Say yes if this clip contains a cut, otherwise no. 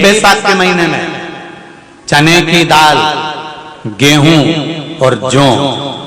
no